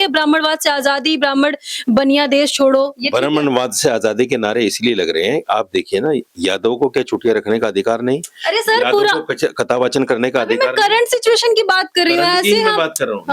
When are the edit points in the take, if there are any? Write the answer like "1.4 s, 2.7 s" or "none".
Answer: none